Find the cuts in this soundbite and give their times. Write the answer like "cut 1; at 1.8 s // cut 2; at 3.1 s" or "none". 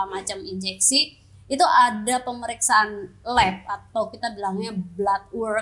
none